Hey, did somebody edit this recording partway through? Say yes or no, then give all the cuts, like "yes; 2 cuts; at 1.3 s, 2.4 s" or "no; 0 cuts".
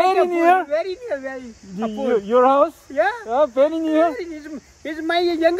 no; 0 cuts